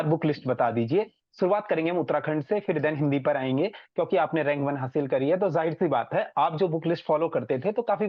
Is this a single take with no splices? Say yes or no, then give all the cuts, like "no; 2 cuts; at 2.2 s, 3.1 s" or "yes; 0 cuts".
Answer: yes; 0 cuts